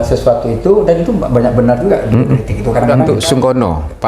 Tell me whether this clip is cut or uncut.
cut